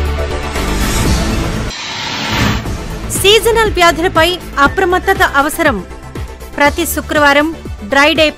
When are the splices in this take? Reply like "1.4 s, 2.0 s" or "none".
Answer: 1.6 s